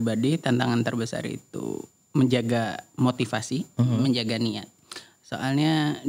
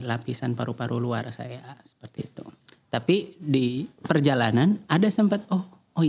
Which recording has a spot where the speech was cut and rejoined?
second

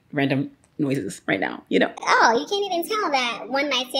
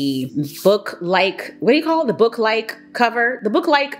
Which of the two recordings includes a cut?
first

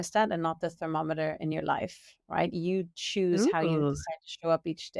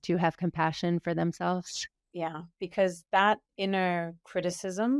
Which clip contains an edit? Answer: second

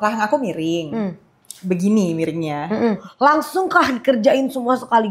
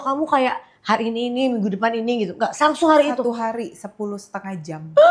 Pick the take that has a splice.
first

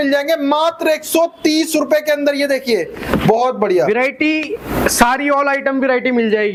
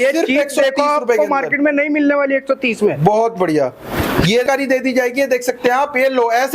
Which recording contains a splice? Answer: second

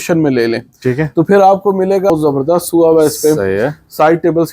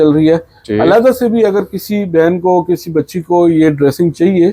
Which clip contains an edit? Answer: first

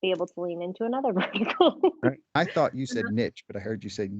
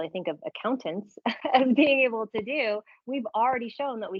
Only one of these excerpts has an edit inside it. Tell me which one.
first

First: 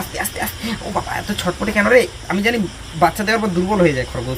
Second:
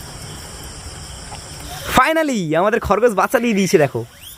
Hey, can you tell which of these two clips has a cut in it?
second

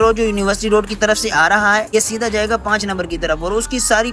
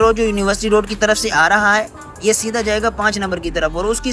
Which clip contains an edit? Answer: first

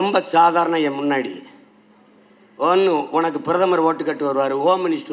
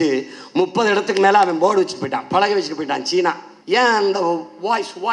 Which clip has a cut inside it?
second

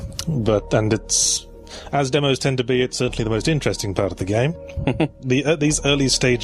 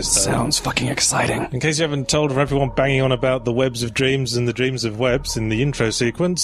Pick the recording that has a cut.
first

